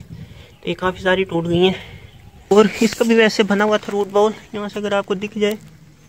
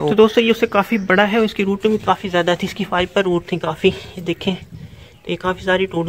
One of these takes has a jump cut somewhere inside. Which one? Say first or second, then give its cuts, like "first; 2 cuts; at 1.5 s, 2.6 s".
first; 1 cut; at 2.5 s